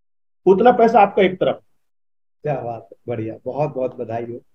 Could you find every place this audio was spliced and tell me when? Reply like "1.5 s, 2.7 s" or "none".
none